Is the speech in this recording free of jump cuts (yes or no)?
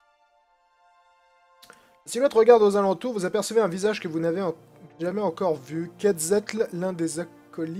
yes